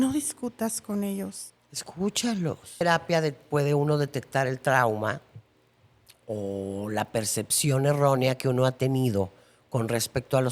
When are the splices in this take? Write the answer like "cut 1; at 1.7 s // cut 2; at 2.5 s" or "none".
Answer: cut 1; at 2.8 s